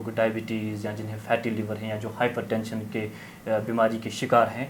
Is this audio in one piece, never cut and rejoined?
yes; 0 cuts

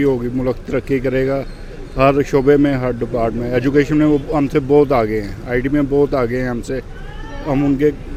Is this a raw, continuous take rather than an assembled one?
yes; 0 cuts

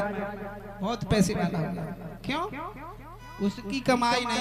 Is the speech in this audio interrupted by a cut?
no; 0 cuts

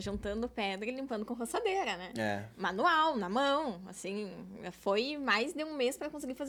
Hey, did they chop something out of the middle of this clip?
no; 0 cuts

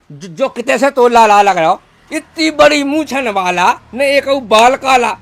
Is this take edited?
no; 0 cuts

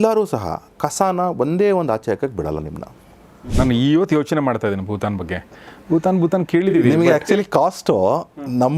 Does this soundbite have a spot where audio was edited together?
yes; 1 cut; at 3.5 s

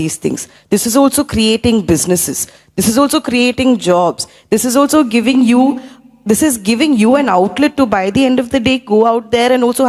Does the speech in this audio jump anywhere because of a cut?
no; 0 cuts

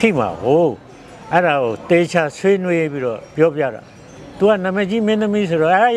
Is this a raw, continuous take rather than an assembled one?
yes; 0 cuts

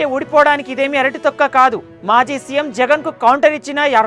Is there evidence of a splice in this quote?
no; 0 cuts

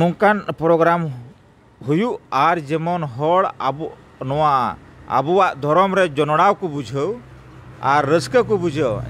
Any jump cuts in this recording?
no; 0 cuts

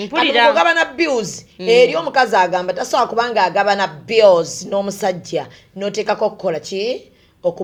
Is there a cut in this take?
no; 0 cuts

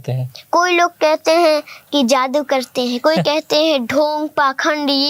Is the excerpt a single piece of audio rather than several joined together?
yes; 0 cuts

